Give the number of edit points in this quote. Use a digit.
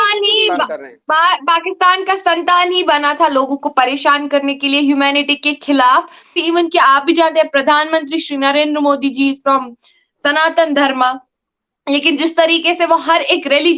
1